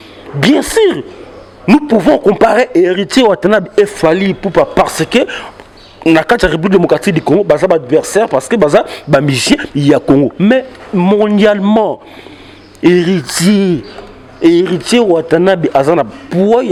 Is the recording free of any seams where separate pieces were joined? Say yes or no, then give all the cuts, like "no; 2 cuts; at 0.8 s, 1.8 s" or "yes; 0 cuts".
yes; 0 cuts